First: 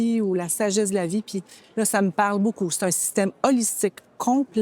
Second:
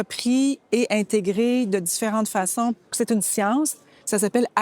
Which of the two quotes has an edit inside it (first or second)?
second